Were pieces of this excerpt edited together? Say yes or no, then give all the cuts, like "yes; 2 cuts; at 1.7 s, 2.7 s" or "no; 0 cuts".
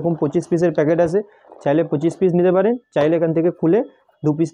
no; 0 cuts